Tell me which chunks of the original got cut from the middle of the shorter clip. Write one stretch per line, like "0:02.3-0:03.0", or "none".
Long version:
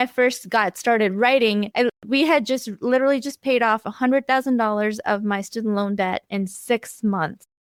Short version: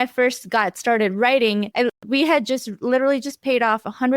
none

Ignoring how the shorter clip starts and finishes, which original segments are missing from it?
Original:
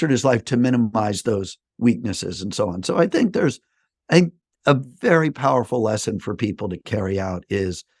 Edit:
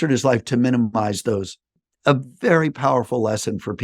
0:01.7-0:04.3

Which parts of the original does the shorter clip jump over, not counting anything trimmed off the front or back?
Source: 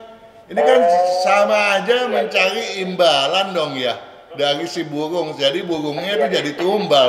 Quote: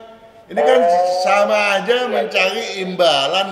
none

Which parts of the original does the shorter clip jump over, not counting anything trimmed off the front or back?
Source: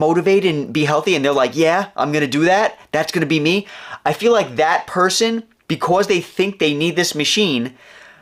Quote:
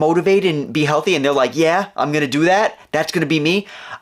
none

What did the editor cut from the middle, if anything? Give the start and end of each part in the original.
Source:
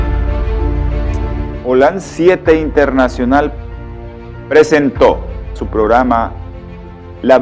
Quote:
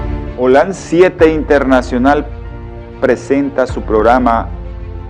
0:04.5-0:05.1

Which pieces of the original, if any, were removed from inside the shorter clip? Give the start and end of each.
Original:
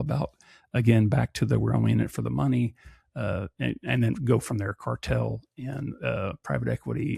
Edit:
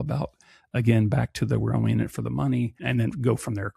0:02.8-0:03.8

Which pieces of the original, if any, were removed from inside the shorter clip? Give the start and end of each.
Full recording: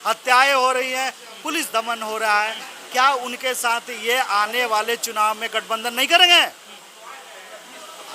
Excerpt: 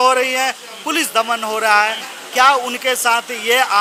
none

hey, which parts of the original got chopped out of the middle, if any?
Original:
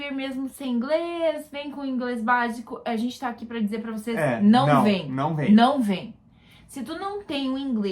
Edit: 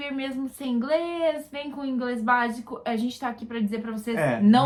none

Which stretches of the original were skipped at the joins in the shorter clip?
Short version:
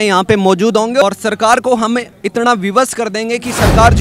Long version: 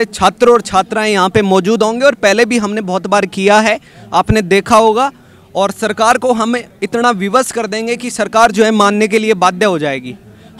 0:02.1-0:05.6

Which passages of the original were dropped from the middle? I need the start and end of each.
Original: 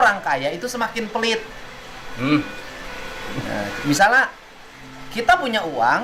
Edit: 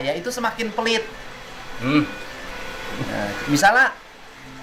none

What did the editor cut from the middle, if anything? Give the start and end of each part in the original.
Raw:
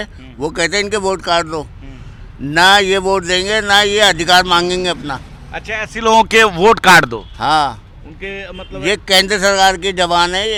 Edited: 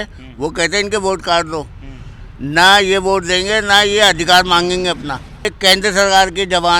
0:05.5-0:09.0

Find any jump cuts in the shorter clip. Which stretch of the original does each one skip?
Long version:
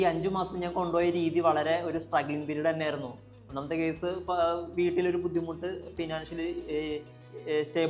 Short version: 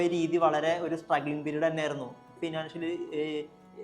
0:03.3-0:05.9

